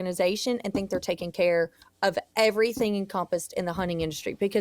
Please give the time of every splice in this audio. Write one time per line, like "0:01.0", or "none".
none